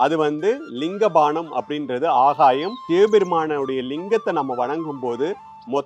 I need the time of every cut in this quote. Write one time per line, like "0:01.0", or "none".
0:02.7